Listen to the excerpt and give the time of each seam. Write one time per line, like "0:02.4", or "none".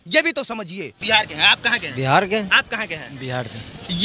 0:00.9

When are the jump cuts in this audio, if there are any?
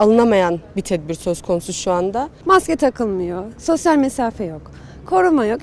0:02.3

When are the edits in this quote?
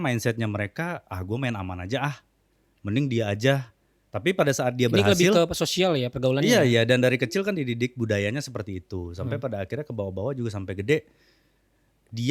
none

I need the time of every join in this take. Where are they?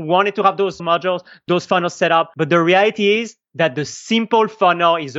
0:02.3

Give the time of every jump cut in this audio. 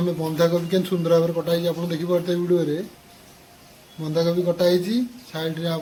none

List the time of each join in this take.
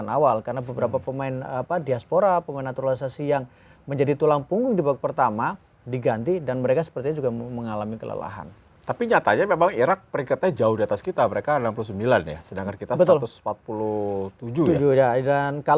none

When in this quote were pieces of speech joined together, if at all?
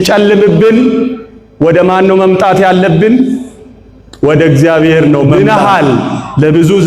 0:05.3

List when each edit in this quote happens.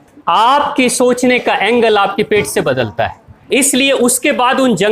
0:03.5

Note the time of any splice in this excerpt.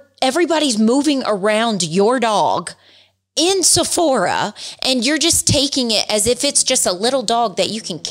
none

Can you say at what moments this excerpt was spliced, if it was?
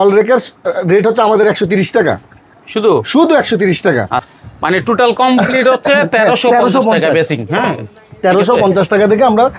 0:04.2

